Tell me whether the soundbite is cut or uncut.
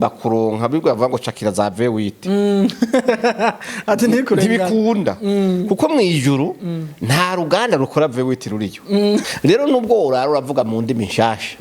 cut